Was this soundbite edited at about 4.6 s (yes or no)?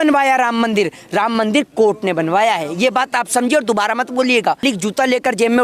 yes